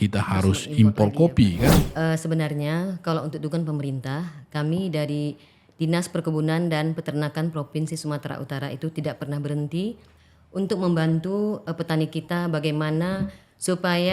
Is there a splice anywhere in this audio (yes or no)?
yes